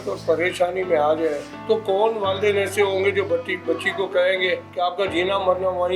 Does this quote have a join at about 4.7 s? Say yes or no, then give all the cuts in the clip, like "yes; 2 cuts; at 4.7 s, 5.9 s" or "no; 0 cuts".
yes; 2 cuts; at 1.5 s, 4.7 s